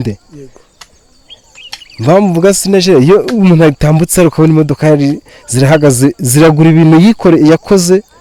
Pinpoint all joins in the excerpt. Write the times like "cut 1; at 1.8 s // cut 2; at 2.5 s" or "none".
none